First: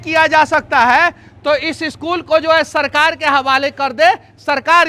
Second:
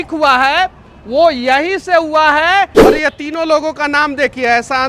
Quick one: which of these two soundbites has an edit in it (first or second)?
second